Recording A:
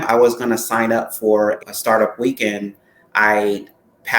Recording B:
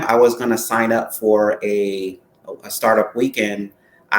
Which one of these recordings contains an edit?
A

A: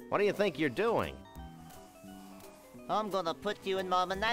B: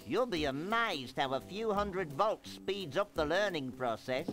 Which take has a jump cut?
A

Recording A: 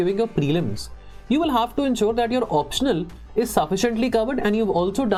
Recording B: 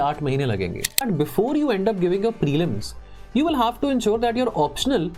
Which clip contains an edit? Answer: B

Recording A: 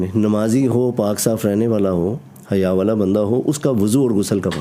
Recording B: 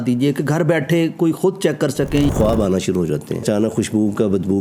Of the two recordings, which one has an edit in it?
B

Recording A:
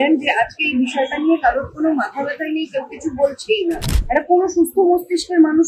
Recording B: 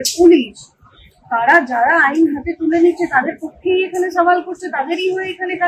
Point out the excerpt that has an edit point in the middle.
A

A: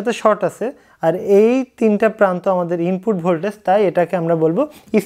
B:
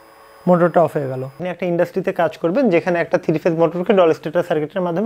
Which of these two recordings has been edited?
B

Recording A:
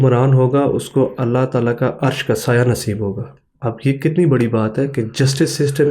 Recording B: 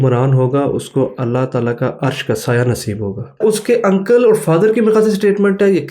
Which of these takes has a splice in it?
B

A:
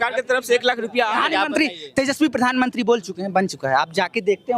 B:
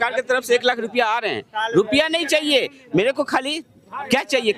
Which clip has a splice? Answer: A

